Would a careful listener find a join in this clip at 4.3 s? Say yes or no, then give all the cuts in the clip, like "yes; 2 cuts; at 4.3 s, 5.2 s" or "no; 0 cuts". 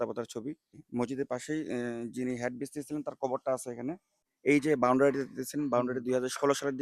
yes; 2 cuts; at 0.8 s, 4.3 s